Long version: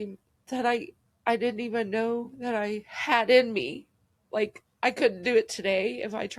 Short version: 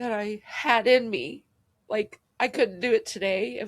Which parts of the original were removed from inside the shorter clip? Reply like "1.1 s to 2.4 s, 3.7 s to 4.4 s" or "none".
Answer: none